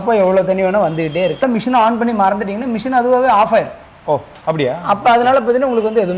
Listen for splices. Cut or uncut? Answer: cut